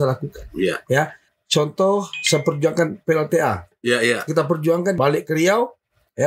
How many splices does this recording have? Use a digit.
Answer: 3